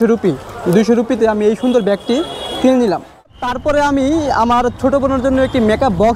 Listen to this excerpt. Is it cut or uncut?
cut